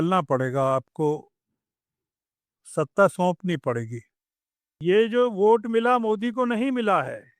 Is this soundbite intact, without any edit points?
no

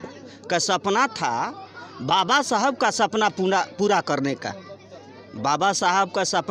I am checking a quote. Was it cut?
no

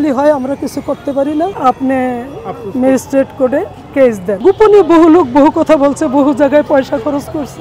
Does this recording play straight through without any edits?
yes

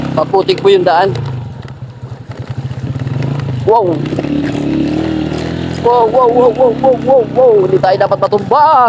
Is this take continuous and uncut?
yes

